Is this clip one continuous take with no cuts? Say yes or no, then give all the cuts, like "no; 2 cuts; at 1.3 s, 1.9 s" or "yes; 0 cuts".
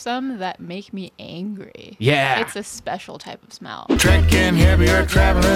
no; 1 cut; at 3.9 s